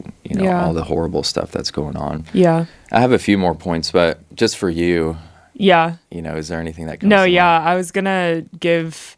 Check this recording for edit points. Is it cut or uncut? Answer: uncut